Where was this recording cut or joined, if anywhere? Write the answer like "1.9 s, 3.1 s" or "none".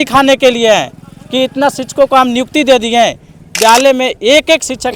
3.5 s